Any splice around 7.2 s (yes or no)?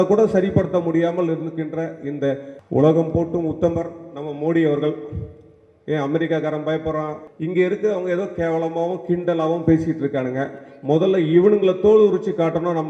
yes